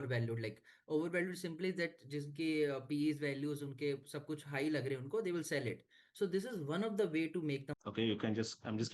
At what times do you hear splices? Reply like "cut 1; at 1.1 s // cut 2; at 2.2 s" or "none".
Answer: cut 1; at 7.7 s